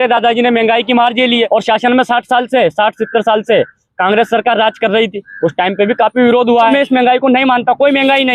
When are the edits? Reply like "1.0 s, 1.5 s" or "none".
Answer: 1.5 s, 6.7 s